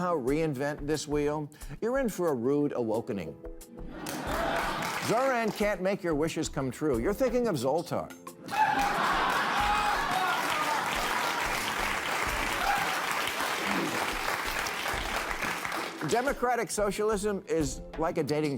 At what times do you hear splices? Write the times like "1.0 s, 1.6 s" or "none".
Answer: 4.9 s